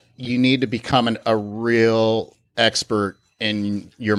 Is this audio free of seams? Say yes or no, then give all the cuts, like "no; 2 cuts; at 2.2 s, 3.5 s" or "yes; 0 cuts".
yes; 0 cuts